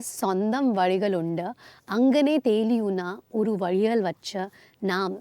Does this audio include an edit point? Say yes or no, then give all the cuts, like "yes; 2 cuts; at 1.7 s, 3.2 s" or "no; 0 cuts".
no; 0 cuts